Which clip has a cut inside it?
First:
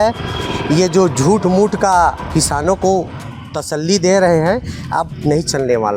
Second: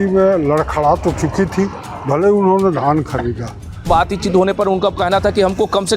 second; 1 cut; at 3.9 s

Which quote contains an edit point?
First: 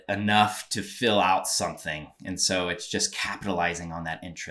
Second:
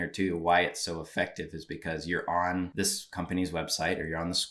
second; 1 cut; at 2.7 s

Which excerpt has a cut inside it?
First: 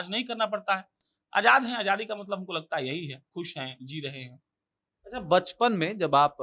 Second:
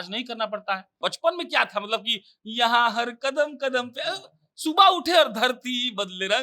second; 1 cut; at 1.0 s

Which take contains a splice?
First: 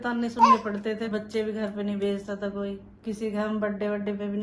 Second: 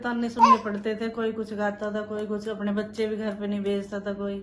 first; 2 cuts; at 1.1 s, 2.9 s

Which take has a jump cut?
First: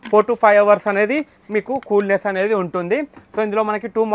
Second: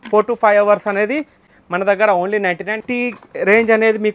second; 2 cuts; at 1.5 s, 2.8 s

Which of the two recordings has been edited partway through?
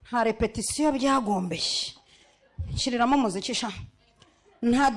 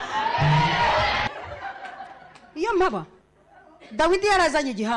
second; 1 cut; at 1.3 s

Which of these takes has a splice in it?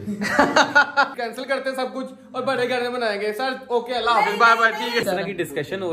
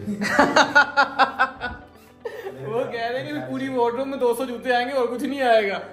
first; 2 cuts; at 1.1 s, 5.0 s

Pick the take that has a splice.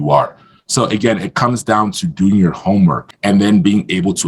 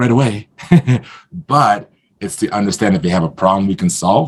first; 1 cut; at 3.1 s

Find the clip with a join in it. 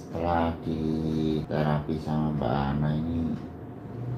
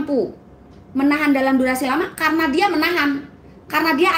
first; 1 cut; at 1.5 s

